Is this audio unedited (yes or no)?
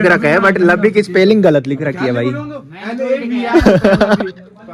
yes